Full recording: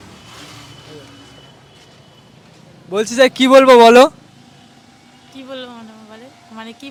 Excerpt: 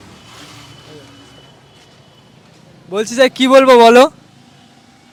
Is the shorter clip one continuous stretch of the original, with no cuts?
yes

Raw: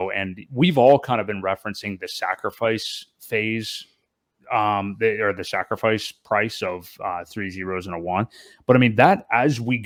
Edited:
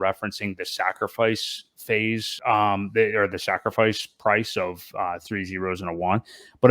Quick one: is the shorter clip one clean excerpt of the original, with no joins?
no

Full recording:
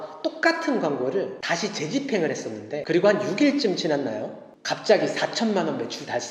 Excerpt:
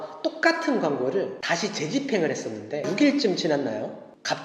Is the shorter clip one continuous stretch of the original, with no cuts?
no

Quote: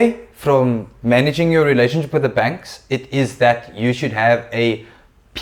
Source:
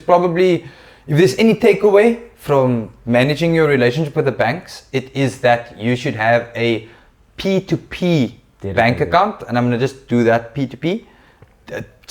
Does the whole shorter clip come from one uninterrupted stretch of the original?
yes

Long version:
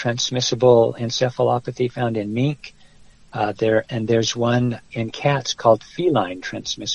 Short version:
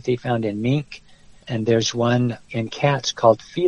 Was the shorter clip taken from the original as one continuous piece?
no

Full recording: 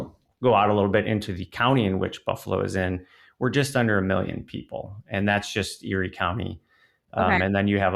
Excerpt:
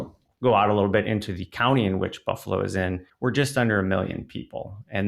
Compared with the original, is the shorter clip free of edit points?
no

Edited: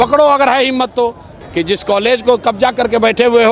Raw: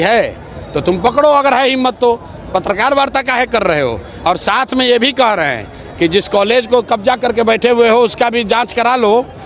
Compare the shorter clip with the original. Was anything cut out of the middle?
yes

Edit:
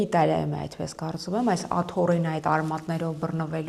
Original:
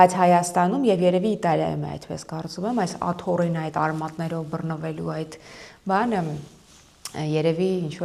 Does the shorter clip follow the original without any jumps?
yes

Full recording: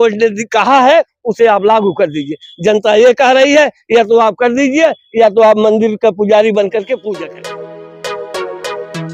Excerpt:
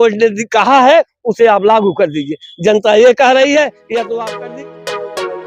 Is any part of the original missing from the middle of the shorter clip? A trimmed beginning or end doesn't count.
yes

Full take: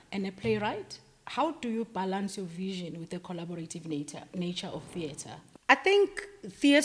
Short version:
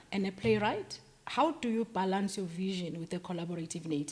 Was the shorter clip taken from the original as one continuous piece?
yes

